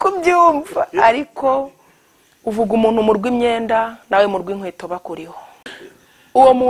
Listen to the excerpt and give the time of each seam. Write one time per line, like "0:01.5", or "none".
0:05.7